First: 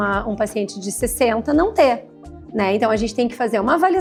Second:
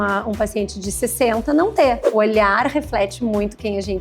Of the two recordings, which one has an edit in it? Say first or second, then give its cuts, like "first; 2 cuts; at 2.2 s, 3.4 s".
second; 1 cut; at 2.1 s